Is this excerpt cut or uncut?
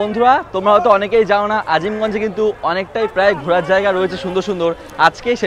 uncut